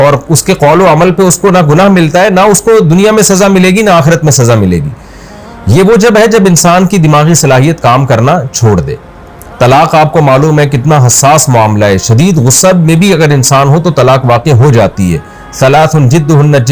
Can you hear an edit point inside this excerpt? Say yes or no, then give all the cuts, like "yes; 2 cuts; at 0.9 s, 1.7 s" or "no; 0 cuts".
no; 0 cuts